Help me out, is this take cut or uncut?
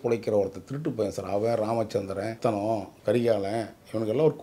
cut